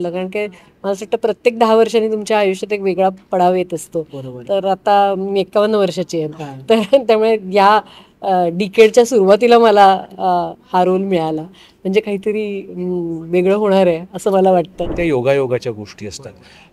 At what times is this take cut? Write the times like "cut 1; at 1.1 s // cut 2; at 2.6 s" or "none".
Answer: cut 1; at 14.9 s